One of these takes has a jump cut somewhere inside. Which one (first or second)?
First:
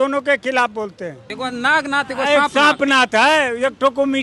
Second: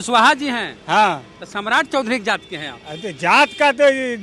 first